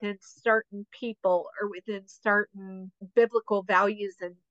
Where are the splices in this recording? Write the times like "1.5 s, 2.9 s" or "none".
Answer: none